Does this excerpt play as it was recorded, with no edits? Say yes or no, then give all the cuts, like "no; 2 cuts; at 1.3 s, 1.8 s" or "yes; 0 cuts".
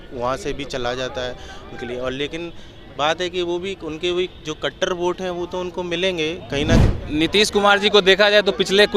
no; 1 cut; at 6.8 s